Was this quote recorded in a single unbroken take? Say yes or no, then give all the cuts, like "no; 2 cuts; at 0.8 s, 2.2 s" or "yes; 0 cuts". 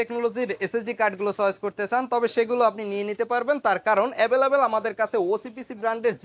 yes; 0 cuts